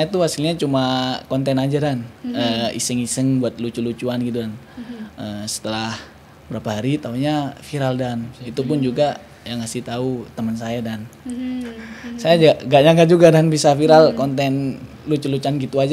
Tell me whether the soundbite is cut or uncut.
uncut